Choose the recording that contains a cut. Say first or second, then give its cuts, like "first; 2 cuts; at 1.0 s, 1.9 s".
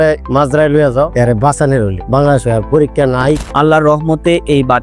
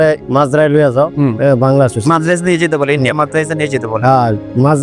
first; 2 cuts; at 1.1 s, 3.4 s